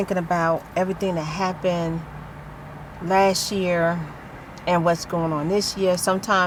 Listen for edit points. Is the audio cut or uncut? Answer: uncut